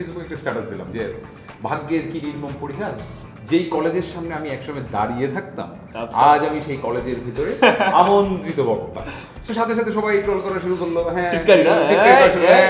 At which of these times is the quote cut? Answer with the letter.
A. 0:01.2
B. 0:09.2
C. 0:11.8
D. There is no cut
D